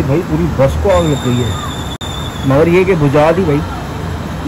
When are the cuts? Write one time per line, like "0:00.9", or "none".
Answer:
none